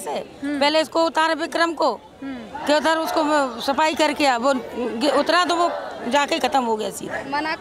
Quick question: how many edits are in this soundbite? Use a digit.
0